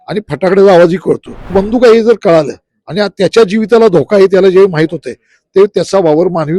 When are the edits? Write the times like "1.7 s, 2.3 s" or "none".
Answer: 1.5 s